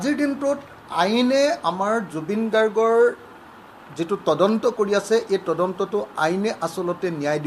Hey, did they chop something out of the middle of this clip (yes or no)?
no